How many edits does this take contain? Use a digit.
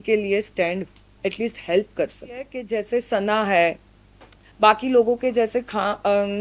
1